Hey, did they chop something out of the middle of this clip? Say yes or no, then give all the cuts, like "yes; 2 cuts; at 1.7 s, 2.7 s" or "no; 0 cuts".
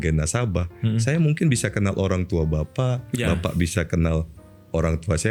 no; 0 cuts